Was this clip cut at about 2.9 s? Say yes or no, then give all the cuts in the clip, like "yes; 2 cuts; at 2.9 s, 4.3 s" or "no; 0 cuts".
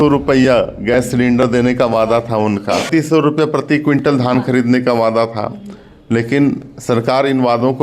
yes; 1 cut; at 2.9 s